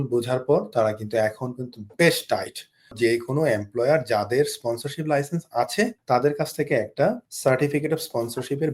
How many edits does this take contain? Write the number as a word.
three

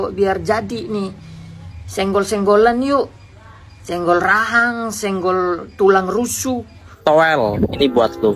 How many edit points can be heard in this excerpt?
one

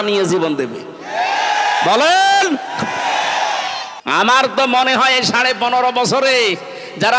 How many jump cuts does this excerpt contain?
one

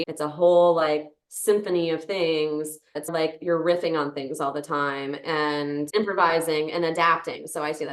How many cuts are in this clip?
two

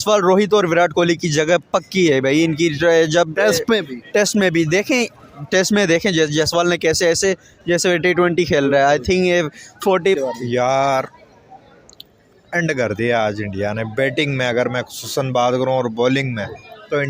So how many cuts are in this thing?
one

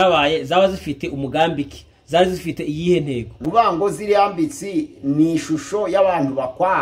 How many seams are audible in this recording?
one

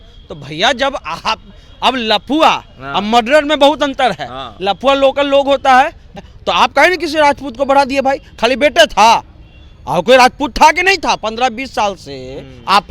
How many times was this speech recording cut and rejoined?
one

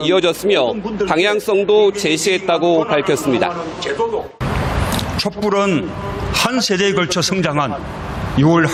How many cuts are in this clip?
zero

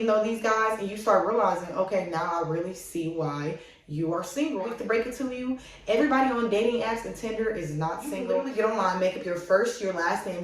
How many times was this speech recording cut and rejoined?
two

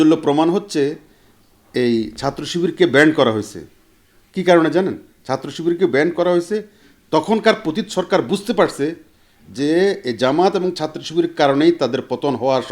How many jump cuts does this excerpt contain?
zero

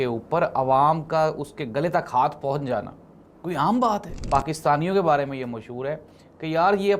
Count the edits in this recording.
one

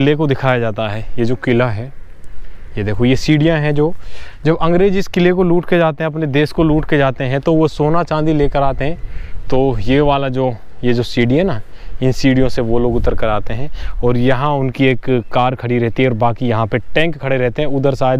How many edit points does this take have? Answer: zero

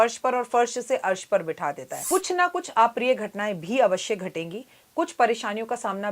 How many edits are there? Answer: one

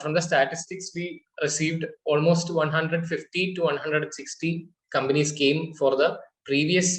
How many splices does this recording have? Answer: zero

